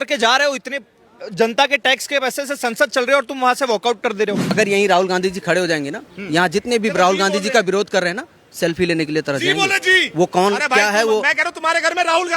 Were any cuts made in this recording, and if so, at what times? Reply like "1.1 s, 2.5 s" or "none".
4.5 s